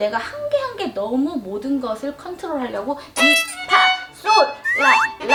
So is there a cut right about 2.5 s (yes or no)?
no